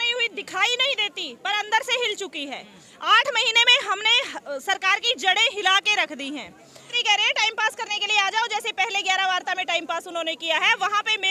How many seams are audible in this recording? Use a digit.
1